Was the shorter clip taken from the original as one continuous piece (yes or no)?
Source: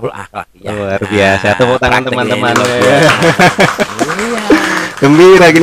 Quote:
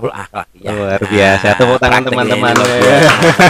yes